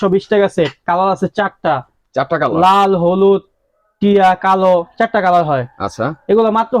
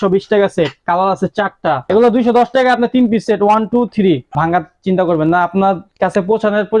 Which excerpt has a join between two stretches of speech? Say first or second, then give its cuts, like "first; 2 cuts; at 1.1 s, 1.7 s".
second; 2 cuts; at 1.8 s, 4.3 s